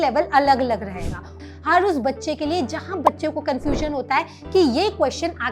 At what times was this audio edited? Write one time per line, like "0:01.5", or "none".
0:01.4